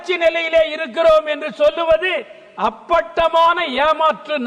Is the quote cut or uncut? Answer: uncut